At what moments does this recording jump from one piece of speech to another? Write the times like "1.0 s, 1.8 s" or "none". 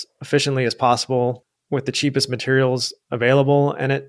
1.5 s